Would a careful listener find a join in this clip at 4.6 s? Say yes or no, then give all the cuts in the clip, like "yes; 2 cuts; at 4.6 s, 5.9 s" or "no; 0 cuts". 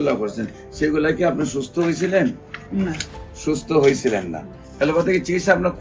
yes; 1 cut; at 4.6 s